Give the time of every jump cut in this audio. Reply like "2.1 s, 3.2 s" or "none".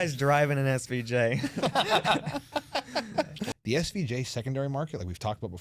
3.5 s

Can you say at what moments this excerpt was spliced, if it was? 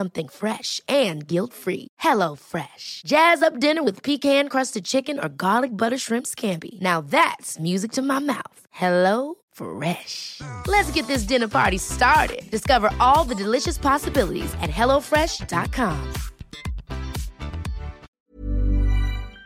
18.1 s

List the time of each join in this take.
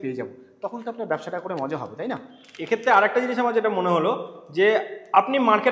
none

